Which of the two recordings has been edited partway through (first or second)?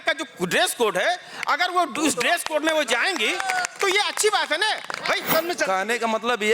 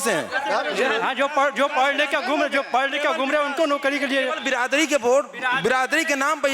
first